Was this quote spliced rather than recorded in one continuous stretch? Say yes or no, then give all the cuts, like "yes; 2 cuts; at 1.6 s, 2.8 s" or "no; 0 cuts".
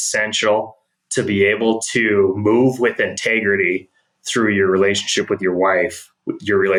no; 0 cuts